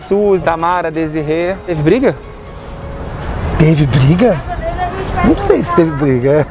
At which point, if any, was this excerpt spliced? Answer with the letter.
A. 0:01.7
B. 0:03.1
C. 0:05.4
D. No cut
A